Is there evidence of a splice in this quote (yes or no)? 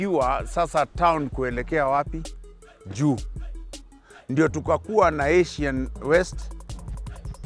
yes